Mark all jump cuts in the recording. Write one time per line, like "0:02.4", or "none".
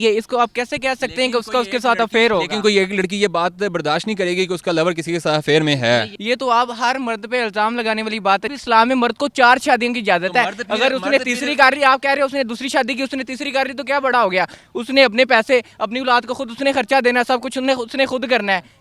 0:06.1
0:08.5